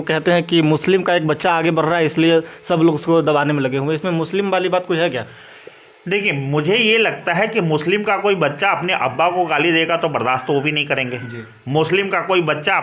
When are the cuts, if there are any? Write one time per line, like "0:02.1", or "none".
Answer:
none

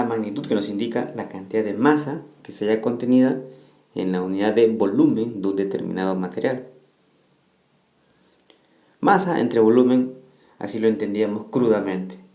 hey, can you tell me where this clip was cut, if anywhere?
0:04.2

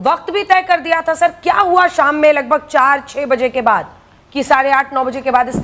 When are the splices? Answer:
none

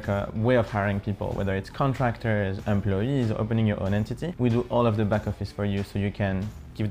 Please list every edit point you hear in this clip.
none

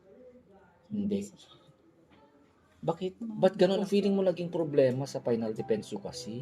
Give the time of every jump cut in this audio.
0:03.8

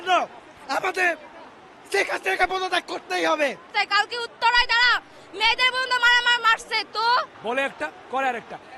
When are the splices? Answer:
0:03.7
0:07.4

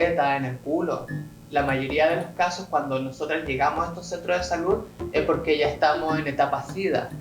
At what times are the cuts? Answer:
0:01.4

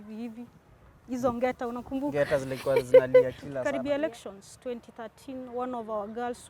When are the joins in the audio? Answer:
0:03.6

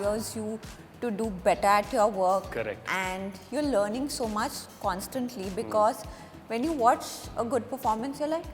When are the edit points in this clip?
none

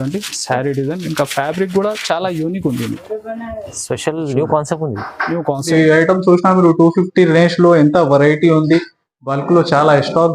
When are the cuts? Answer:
0:05.7

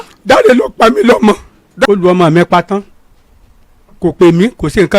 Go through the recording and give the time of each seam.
0:01.9

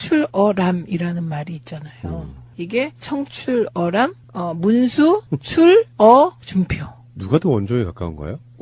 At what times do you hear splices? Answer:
none

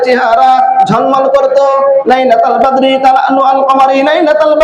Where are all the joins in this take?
0:02.0

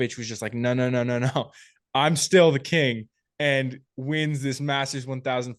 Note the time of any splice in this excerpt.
none

